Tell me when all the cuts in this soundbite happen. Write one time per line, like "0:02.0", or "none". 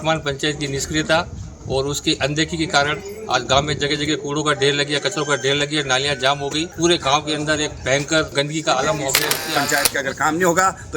0:06.7
0:08.3
0:09.6